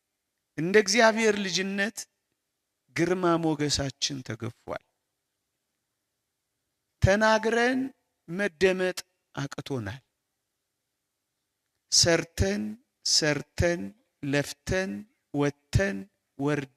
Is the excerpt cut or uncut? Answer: uncut